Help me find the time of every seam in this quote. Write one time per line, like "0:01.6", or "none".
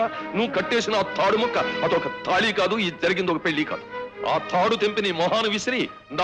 none